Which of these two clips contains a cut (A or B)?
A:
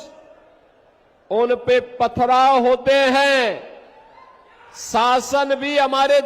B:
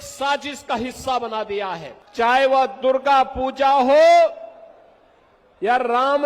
B